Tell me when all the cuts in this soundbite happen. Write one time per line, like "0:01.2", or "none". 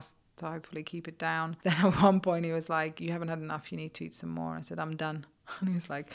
0:01.6